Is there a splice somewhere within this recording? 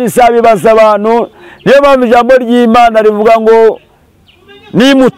no; 0 cuts

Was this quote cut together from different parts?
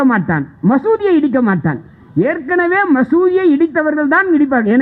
no; 0 cuts

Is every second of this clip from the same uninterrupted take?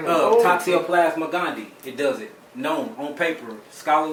yes; 0 cuts

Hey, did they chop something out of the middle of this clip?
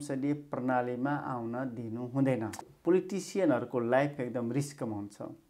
yes; 1 cut; at 2.7 s

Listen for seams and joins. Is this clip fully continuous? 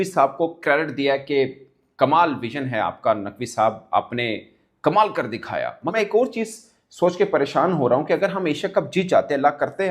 no; 1 cut; at 5.9 s

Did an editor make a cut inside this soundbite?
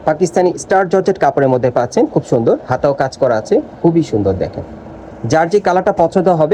no; 0 cuts

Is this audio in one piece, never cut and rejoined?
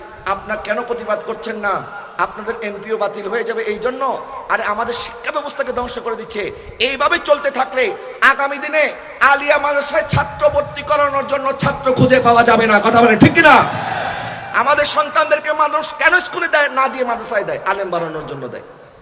yes; 0 cuts

